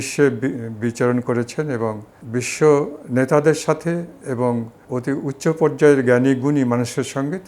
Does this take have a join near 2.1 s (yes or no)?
yes